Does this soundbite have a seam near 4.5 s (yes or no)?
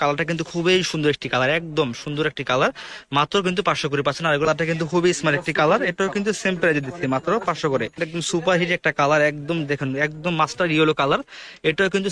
yes